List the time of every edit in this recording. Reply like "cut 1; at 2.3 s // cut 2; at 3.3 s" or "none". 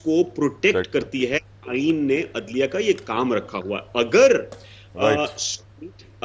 none